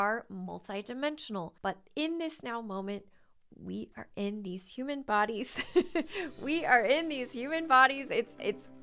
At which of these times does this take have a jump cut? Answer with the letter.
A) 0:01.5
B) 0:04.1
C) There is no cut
A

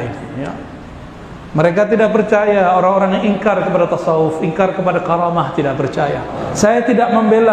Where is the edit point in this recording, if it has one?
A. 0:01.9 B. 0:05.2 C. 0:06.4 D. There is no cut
C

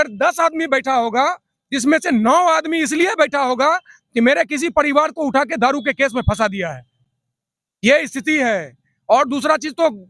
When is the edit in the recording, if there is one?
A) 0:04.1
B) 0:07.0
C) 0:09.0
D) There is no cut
D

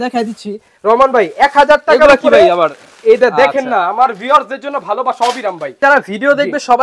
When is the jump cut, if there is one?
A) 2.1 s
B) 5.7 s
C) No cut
B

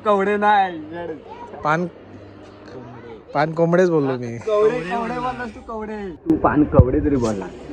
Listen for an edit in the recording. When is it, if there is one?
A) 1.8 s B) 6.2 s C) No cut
B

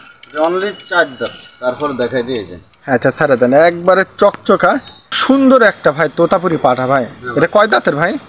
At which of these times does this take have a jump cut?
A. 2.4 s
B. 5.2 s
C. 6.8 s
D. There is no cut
B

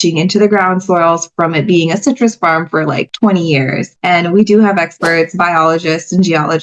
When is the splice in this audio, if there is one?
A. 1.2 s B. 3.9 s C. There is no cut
B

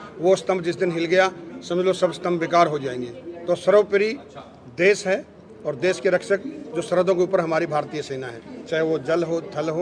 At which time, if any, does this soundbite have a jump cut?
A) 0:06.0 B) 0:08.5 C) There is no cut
C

